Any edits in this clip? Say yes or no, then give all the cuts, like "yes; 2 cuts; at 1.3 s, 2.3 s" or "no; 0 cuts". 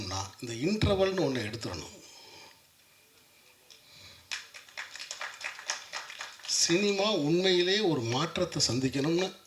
no; 0 cuts